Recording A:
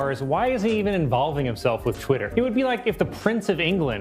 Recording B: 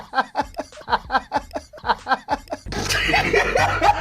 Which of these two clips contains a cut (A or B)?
B